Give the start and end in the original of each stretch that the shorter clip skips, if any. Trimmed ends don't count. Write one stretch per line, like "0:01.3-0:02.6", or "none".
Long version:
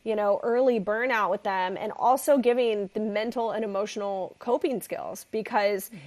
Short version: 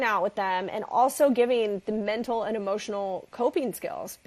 none

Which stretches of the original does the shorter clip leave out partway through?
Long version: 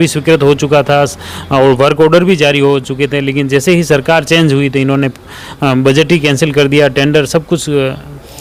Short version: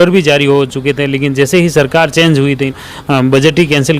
0:04.8-0:05.2

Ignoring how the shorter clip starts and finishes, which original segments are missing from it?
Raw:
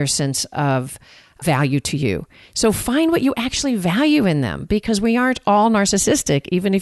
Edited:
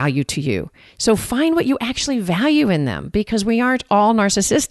none

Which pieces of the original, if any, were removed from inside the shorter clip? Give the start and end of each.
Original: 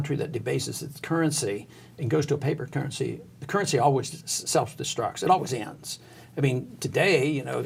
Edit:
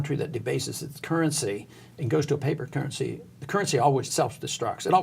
0:04.1-0:04.5

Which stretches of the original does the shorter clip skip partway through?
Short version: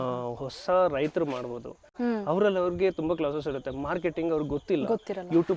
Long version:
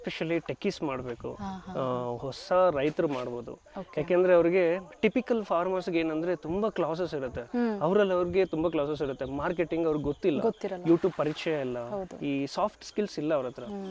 0:03.7-0:07.4

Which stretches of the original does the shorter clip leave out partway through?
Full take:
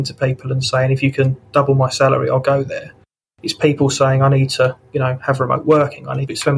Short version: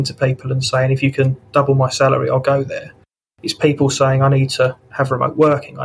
0:04.9-0:05.1

